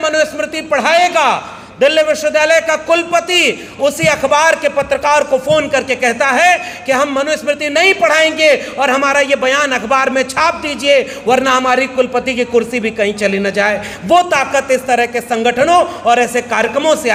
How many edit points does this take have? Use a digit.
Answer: 0